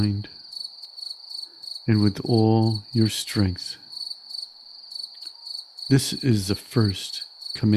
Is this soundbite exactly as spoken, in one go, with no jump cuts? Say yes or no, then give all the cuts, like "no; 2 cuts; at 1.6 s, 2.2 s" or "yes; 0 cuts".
no; 2 cuts; at 3.8 s, 5.8 s